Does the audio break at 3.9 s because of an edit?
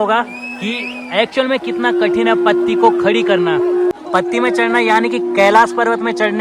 yes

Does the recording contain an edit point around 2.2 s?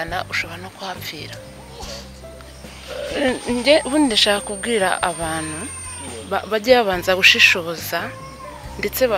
yes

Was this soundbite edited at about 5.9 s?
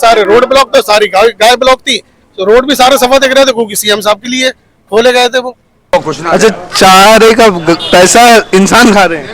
yes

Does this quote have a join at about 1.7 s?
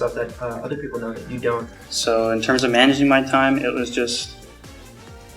yes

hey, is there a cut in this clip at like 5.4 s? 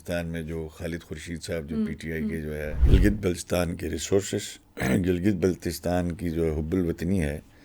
no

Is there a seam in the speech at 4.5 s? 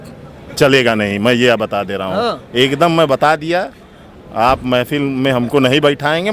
no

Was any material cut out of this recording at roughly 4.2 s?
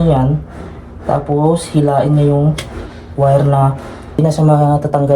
yes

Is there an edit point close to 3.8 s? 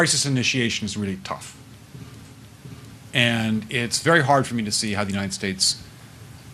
no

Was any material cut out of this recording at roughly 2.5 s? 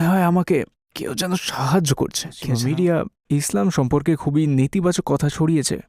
yes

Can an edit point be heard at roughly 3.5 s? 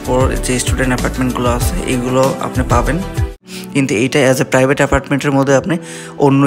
yes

